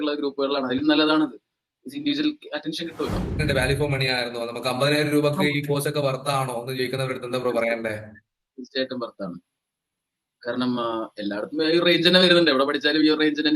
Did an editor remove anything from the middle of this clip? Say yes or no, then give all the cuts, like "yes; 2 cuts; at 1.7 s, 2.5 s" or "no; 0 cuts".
yes; 1 cut; at 3.4 s